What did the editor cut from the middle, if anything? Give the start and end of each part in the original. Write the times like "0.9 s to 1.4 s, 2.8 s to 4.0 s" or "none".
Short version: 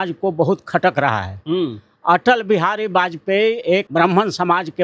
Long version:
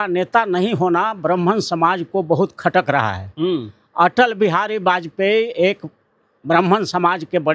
5.8 s to 6.4 s

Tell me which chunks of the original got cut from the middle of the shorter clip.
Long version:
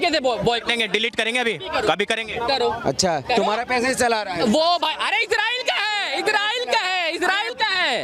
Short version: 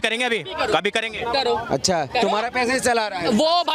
none

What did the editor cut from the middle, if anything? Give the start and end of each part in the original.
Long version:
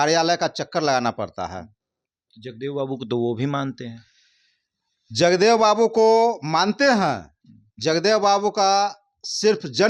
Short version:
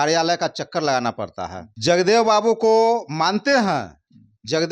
1.6 s to 5.0 s

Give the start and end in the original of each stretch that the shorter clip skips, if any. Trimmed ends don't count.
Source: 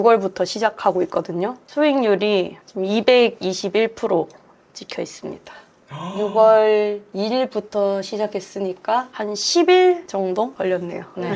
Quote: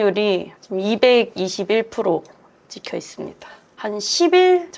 5.8 s to 9.1 s

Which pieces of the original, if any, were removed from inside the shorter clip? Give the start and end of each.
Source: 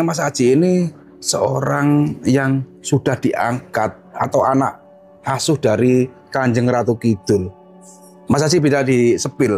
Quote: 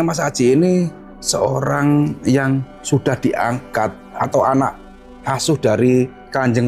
none

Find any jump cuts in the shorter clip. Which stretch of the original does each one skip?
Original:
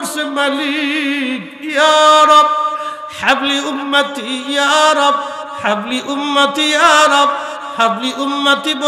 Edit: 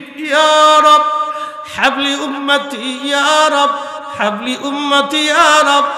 none

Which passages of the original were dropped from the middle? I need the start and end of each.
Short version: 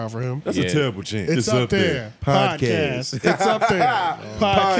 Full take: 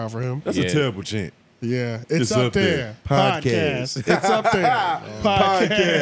1.2 s to 2.1 s

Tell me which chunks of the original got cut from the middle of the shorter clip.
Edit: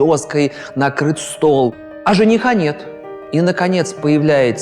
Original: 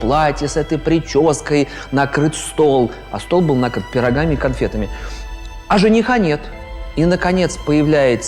3.0 s to 5.5 s

